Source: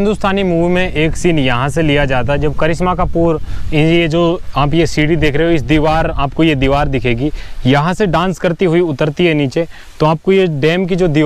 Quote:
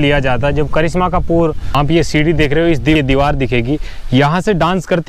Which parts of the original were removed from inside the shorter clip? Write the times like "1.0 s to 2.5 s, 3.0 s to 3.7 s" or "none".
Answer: 3.5 s to 4.5 s, 5.8 s to 6.5 s